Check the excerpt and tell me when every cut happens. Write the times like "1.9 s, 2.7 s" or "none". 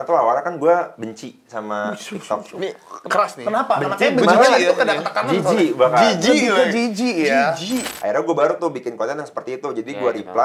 7.9 s

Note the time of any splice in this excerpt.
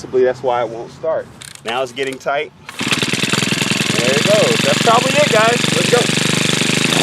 1.4 s

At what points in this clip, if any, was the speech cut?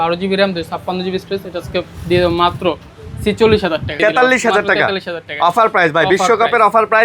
3.9 s

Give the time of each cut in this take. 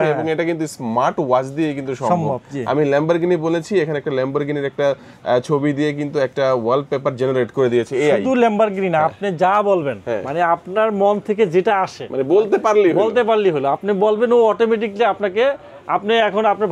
none

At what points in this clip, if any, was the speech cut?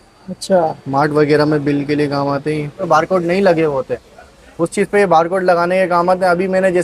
2.9 s

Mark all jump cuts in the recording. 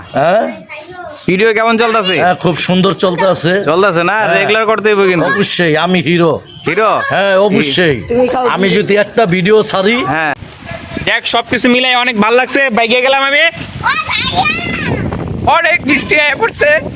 10.3 s

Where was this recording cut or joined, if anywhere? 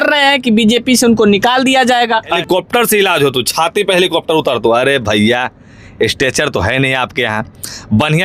2.4 s

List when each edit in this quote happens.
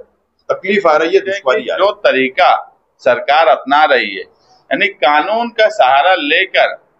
1.7 s

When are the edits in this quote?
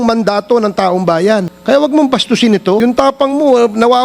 1.5 s, 2.8 s

